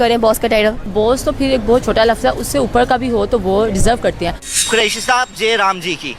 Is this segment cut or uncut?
cut